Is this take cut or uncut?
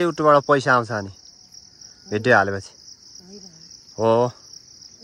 uncut